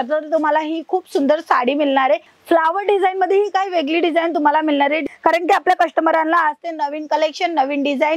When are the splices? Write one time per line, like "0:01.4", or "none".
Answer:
0:02.3
0:05.0